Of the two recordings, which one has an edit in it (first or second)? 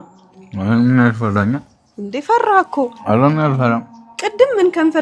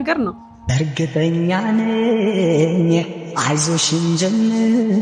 second